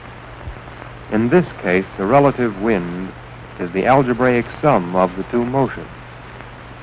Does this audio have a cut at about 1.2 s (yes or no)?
yes